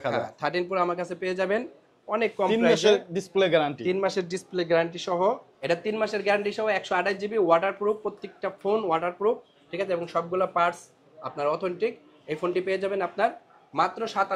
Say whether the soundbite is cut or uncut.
uncut